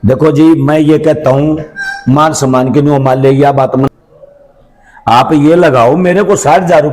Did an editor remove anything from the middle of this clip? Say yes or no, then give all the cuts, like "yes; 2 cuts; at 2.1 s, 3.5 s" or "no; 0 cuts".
yes; 1 cut; at 3.9 s